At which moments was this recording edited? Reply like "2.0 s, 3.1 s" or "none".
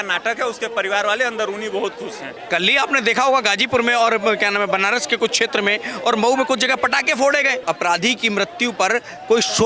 2.4 s, 7.6 s